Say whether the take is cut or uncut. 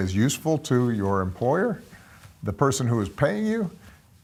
uncut